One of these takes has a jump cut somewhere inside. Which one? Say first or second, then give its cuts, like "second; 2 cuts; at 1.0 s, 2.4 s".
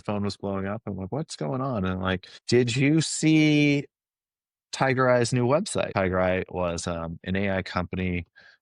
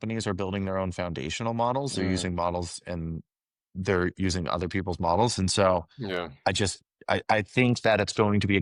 first; 2 cuts; at 2.3 s, 5.9 s